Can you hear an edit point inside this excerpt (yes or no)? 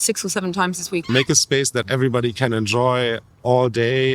yes